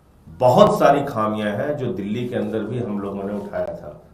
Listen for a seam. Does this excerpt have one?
no; 0 cuts

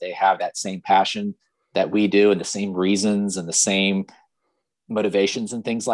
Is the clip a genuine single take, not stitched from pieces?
yes; 0 cuts

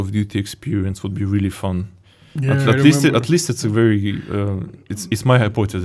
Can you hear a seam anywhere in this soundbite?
no; 0 cuts

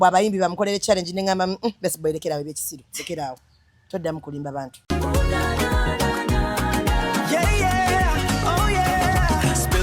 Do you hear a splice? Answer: yes; 1 cut; at 4.8 s

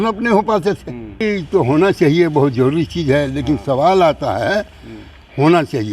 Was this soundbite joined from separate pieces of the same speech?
yes; 1 cut; at 1.2 s

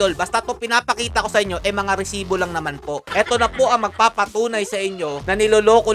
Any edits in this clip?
yes; 1 cut; at 2.9 s

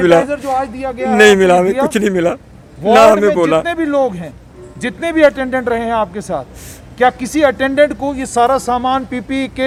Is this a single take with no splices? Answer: yes; 0 cuts

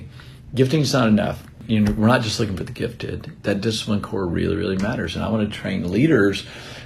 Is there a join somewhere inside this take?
yes; 1 cut; at 1.6 s

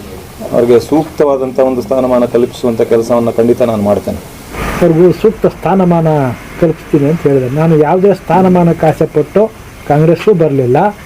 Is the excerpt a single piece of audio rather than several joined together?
no; 1 cut; at 4.4 s

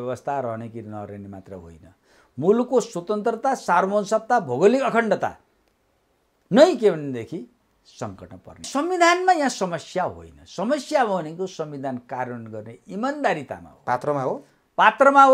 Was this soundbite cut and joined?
yes; 1 cut; at 8.6 s

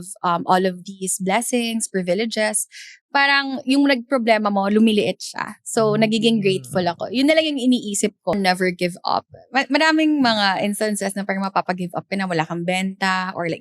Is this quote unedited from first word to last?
no; 1 cut; at 8.3 s

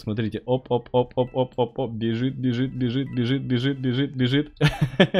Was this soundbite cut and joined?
no; 0 cuts

